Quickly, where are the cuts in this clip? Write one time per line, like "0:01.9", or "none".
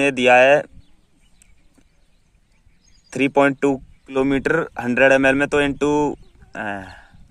0:04.1